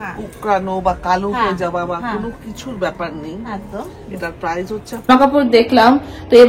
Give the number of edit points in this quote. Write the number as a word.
one